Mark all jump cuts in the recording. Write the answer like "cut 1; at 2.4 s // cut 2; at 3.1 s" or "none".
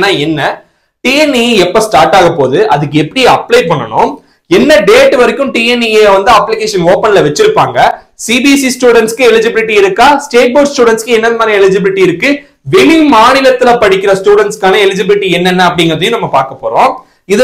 none